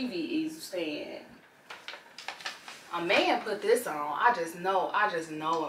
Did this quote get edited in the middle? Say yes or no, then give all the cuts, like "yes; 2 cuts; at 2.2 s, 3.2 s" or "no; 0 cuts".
yes; 1 cut; at 1.5 s